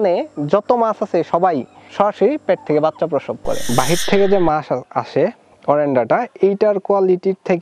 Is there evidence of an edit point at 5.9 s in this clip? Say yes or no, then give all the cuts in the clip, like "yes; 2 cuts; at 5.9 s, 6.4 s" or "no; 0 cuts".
no; 2 cuts; at 1.8 s, 3.6 s